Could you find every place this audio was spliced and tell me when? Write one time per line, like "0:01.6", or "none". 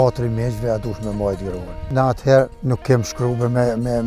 0:01.9
0:02.6